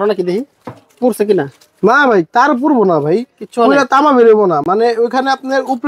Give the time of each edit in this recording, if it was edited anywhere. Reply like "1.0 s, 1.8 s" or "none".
none